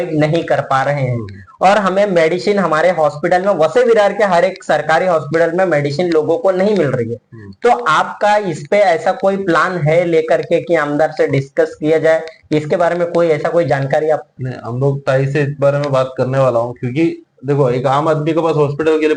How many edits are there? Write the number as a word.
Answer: zero